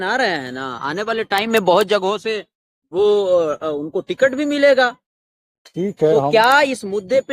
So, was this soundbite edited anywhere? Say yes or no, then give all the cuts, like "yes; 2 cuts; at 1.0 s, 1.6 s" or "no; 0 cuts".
no; 0 cuts